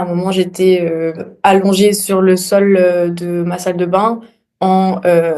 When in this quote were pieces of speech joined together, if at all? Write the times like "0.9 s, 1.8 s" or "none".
1.3 s